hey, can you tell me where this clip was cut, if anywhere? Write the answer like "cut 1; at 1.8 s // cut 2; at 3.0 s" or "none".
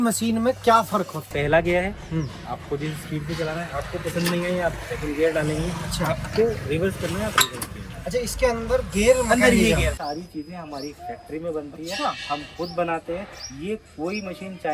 cut 1; at 1.3 s // cut 2; at 10.0 s